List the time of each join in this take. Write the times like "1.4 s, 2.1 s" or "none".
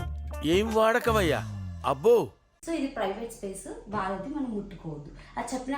2.5 s